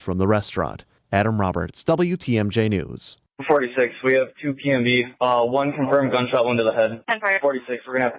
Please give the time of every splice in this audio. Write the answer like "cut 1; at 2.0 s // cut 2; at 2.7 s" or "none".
cut 1; at 3.3 s